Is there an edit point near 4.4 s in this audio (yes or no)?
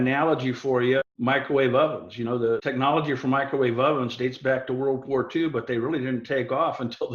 no